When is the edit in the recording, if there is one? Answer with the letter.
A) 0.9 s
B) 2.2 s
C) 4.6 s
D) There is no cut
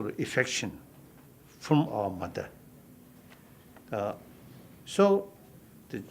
B